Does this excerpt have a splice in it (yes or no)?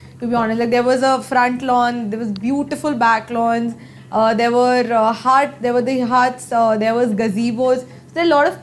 no